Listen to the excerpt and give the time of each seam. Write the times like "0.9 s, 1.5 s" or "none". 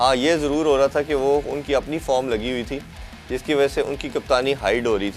none